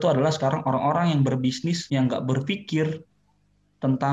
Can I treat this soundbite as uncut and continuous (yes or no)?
no